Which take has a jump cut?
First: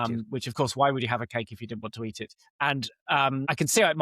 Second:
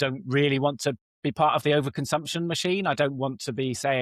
first; 1 cut; at 2.4 s

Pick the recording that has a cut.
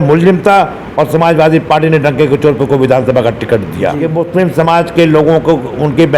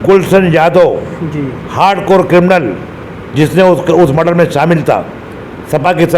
first; 1 cut; at 4.0 s

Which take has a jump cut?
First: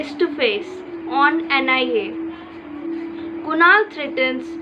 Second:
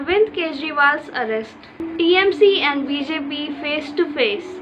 second; 1 cut; at 1.8 s

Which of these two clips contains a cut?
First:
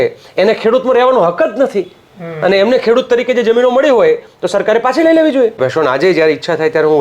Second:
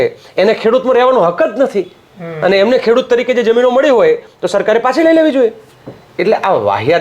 first; 1 cut; at 5.6 s

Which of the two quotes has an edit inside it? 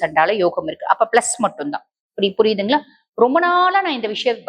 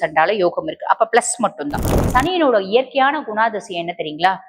second; 1 cut; at 2.0 s

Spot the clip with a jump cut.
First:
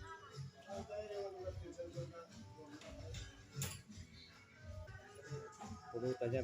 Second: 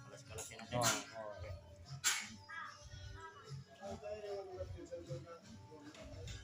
first; 1 cut; at 4.9 s

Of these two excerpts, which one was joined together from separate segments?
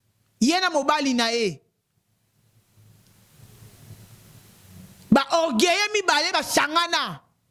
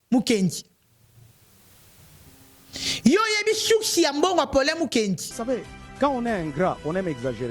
second; 1 cut; at 5.3 s

